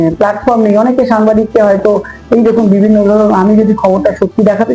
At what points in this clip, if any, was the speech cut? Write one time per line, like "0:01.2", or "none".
none